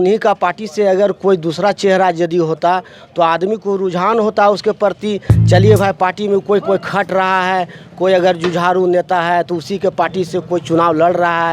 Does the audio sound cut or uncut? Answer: uncut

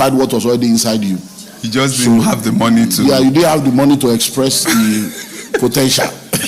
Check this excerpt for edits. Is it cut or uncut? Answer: uncut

